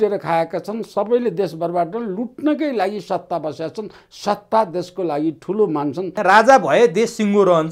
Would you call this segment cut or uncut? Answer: cut